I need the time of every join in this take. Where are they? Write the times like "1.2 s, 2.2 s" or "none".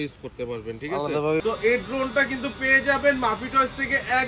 1.4 s